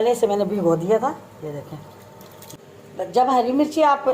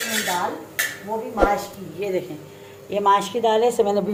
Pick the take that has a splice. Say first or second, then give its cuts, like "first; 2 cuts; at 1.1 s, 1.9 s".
first; 1 cut; at 2.5 s